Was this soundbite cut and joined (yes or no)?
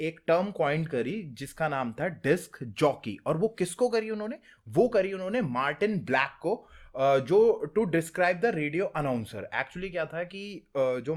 no